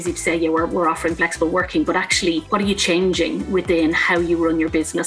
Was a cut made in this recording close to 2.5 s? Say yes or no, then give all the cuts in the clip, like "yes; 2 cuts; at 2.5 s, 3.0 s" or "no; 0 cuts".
yes; 1 cut; at 2.5 s